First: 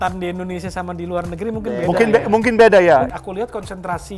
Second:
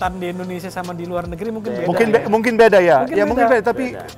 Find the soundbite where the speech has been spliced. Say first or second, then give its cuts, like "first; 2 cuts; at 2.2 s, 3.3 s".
first; 1 cut; at 3.1 s